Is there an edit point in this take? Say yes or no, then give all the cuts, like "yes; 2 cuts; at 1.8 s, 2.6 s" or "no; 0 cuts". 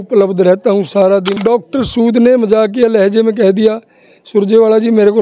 yes; 1 cut; at 1.4 s